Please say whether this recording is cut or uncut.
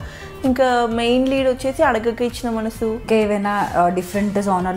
cut